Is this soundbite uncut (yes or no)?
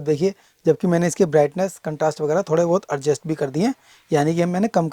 yes